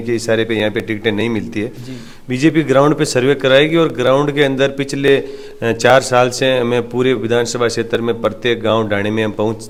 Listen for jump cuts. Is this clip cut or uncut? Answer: uncut